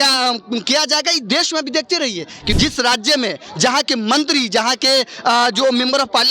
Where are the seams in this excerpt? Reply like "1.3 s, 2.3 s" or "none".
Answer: 2.5 s